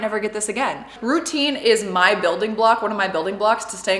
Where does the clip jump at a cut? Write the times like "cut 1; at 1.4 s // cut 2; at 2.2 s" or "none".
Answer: cut 1; at 0.9 s